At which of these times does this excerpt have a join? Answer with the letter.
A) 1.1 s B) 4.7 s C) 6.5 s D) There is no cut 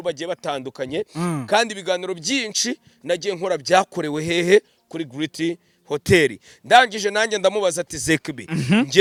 D